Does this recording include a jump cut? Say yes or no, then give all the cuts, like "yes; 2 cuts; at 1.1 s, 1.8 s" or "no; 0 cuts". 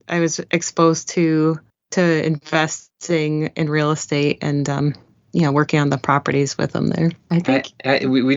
yes; 1 cut; at 7.2 s